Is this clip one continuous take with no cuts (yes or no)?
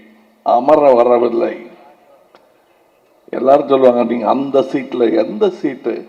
yes